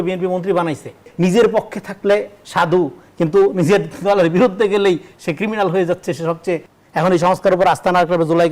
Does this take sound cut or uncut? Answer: cut